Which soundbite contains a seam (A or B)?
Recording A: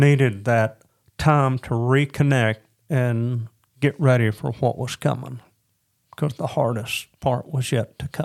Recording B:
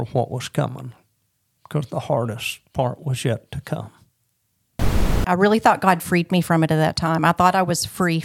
B